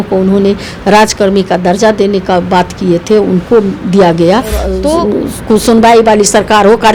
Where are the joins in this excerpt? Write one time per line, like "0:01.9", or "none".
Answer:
0:04.8